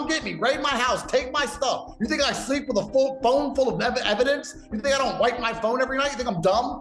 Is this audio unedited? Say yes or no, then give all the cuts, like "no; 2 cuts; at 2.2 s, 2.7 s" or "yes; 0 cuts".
yes; 0 cuts